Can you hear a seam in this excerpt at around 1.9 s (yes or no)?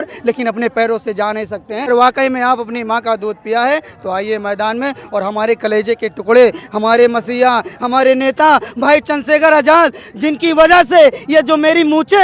yes